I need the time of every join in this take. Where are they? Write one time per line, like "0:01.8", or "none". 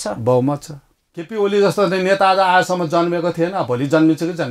0:01.3